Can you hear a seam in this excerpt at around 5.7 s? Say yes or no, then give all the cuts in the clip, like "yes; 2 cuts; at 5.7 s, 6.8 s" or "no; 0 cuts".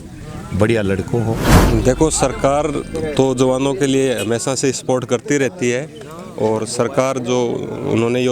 no; 1 cut; at 1.5 s